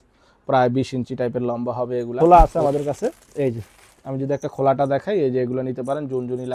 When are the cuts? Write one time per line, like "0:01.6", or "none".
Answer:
0:02.1